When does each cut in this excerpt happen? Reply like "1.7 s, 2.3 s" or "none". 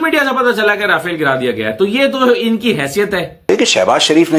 3.5 s